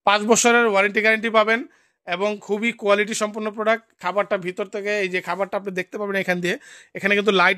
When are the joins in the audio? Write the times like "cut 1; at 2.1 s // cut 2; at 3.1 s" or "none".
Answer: none

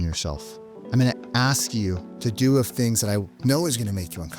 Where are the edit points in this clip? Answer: cut 1; at 2.1 s // cut 2; at 3.3 s

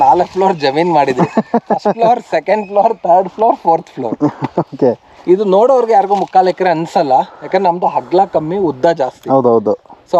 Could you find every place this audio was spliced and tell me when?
none

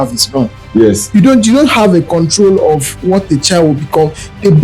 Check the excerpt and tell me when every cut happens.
cut 1; at 1.0 s

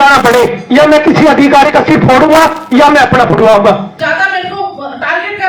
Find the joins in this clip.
cut 1; at 3.9 s

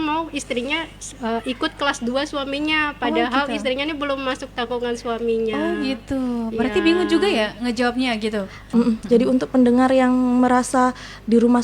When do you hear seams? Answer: cut 1; at 8.6 s

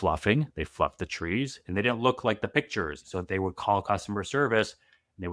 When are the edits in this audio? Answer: cut 1; at 3.0 s

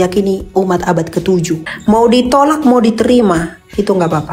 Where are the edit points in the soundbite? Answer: cut 1; at 1.6 s

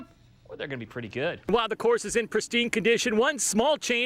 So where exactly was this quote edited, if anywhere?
cut 1; at 1.4 s

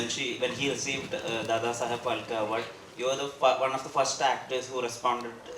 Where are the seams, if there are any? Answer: none

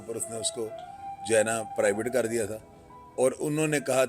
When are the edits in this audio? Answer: none

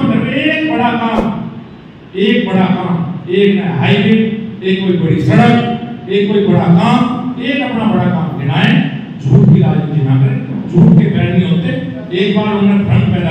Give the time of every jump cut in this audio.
none

